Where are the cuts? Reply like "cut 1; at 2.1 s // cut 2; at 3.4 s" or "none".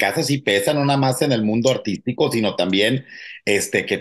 none